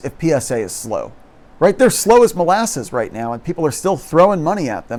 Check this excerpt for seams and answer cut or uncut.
uncut